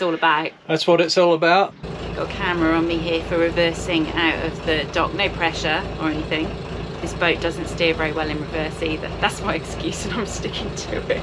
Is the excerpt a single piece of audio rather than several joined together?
no; 2 cuts; at 1.8 s, 7.0 s

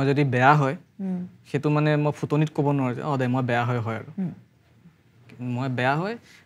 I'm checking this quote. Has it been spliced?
no; 0 cuts

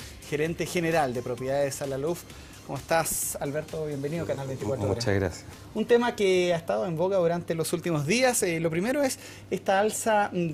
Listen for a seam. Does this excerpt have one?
no; 0 cuts

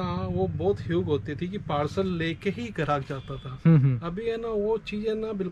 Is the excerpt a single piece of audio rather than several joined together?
yes; 0 cuts

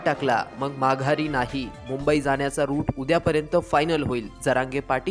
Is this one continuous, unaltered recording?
yes; 0 cuts

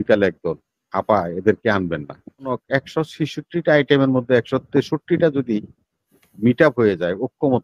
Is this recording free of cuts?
no; 1 cut; at 2.5 s

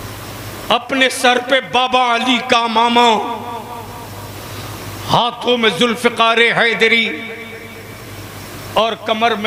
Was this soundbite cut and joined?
no; 0 cuts

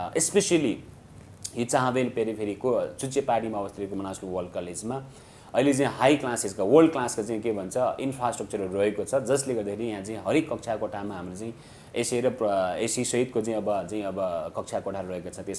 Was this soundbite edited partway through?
no; 0 cuts

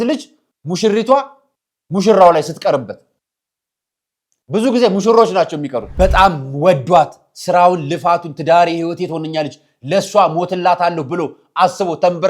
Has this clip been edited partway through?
yes; 1 cut; at 5.8 s

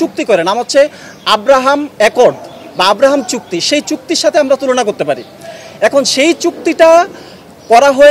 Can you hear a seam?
no; 0 cuts

